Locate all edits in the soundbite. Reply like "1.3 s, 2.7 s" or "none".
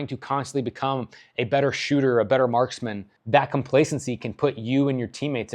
3.1 s